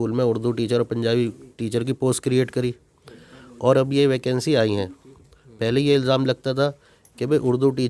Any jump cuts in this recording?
no; 0 cuts

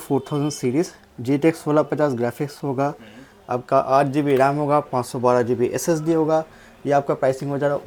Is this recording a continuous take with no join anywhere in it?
yes; 0 cuts

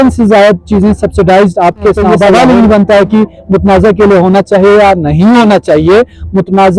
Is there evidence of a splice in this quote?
yes; 1 cut; at 2.3 s

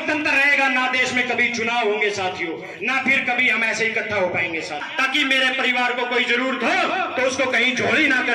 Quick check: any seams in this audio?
yes; 1 cut; at 4.9 s

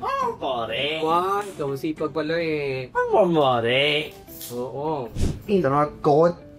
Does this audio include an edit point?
no; 0 cuts

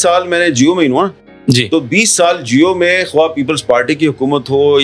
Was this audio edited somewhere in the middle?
no; 0 cuts

